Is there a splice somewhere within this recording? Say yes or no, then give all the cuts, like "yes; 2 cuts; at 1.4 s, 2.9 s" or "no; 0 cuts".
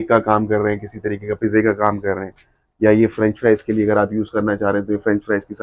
no; 0 cuts